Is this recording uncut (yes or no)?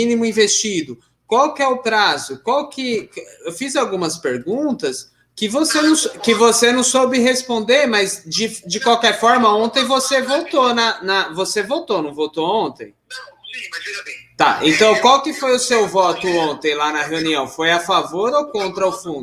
yes